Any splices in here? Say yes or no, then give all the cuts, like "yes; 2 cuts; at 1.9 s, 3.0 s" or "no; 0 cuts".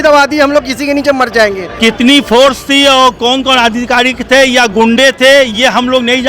yes; 1 cut; at 1.7 s